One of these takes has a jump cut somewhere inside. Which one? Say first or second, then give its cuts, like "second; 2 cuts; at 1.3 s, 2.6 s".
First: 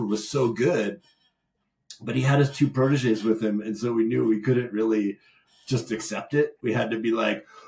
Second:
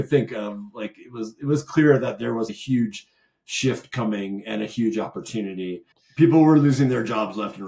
second; 2 cuts; at 2.6 s, 6.0 s